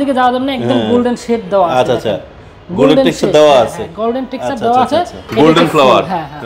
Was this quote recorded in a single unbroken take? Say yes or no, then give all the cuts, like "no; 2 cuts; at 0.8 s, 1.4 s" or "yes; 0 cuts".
no; 1 cut; at 5.2 s